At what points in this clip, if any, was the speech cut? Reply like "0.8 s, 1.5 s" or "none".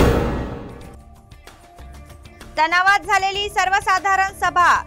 2.2 s